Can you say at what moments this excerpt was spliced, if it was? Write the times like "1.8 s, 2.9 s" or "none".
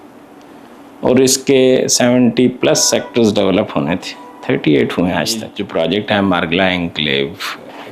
5.6 s